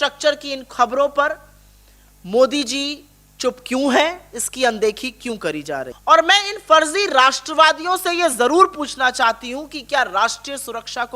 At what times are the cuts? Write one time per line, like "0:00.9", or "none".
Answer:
0:05.9